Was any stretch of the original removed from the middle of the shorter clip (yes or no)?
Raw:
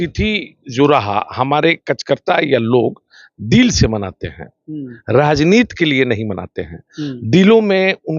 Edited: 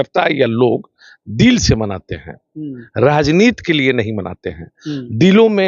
no